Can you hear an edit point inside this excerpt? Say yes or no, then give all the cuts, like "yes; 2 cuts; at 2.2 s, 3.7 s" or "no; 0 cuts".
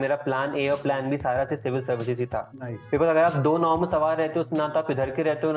no; 0 cuts